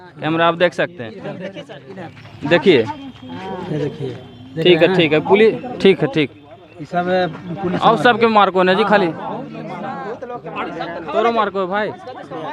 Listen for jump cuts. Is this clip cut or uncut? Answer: uncut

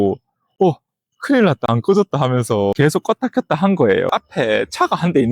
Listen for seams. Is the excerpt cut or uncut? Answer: cut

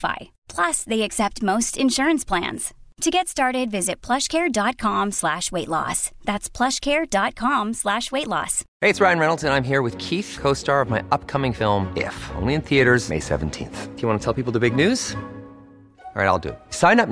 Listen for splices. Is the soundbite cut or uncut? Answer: cut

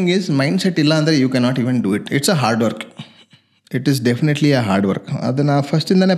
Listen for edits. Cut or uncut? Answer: uncut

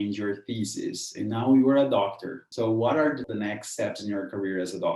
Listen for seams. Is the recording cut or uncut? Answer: cut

